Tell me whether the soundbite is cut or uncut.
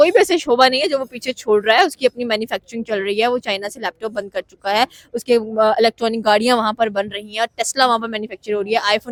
uncut